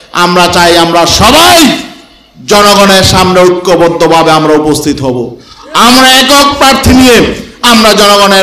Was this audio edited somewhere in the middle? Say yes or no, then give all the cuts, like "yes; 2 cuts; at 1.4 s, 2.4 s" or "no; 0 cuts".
no; 0 cuts